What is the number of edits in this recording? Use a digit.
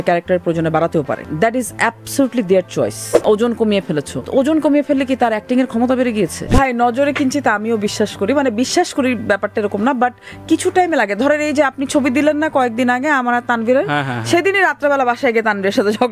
4